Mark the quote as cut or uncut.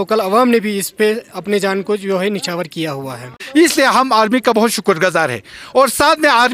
cut